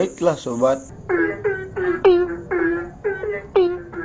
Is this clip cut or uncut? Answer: cut